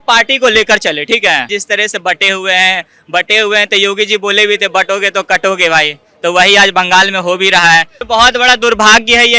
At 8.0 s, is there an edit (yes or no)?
yes